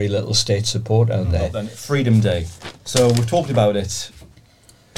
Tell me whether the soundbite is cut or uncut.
cut